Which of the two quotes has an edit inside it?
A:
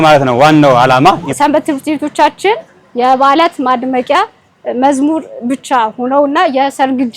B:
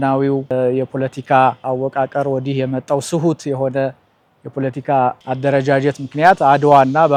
A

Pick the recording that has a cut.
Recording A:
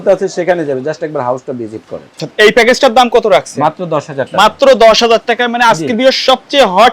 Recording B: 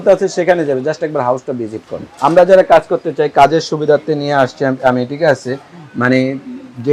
A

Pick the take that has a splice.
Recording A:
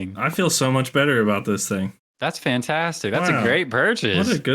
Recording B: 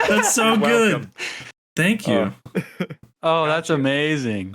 A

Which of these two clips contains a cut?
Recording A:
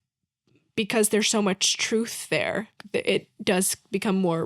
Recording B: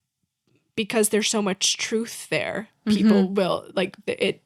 A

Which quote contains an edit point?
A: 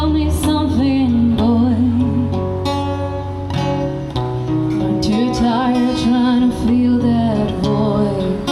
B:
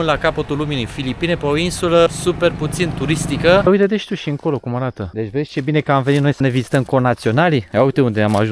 B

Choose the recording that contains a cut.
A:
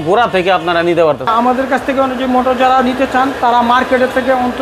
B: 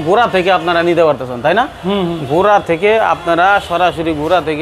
A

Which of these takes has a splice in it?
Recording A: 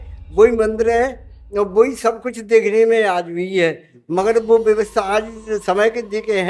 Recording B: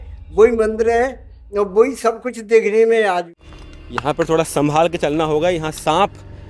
B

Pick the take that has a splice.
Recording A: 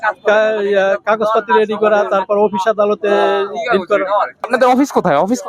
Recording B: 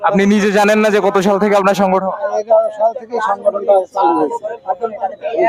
A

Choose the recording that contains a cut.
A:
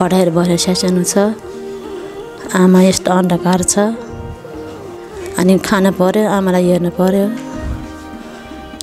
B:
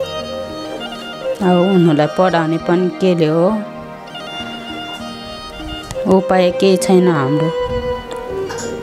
B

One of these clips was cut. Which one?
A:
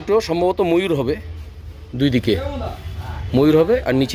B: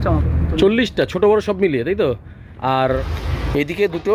B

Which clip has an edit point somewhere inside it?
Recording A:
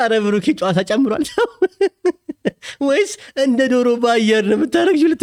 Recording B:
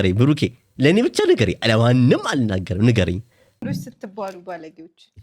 B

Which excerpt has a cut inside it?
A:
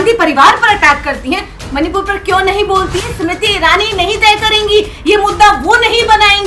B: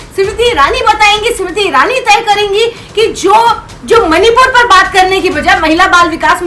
A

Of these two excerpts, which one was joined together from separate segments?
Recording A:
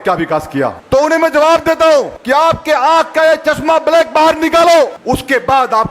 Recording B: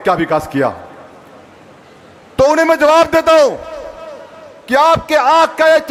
A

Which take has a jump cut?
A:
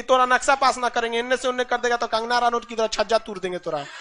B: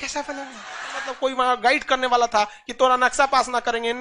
B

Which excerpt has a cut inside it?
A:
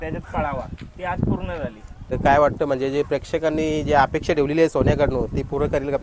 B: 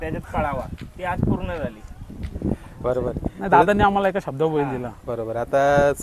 A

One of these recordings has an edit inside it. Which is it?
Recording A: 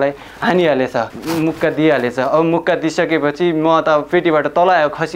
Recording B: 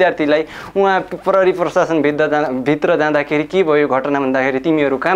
A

